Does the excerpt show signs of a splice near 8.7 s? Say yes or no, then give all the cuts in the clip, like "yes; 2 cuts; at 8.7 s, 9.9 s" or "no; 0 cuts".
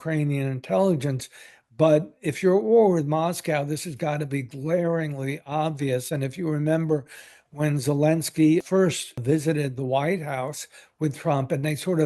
yes; 1 cut; at 8.7 s